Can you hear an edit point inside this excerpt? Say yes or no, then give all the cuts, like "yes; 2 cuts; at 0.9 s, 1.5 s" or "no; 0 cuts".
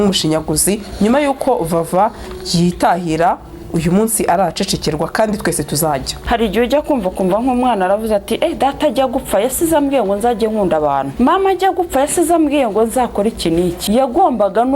yes; 3 cuts; at 6.1 s, 11.1 s, 13.8 s